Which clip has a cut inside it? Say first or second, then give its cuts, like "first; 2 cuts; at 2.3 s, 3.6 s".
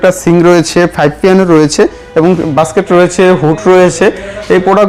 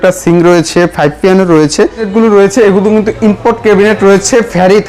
second; 1 cut; at 2.1 s